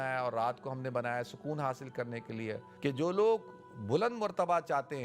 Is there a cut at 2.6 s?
yes; 1 cut; at 2.6 s

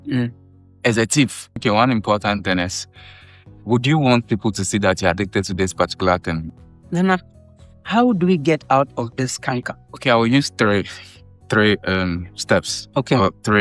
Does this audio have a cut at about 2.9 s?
no; 2 cuts; at 1.6 s, 6.4 s

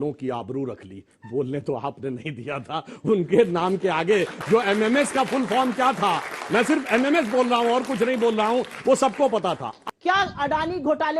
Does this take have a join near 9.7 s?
yes; 1 cut; at 9.7 s

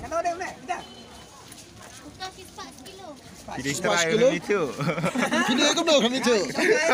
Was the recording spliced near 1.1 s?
no; 0 cuts

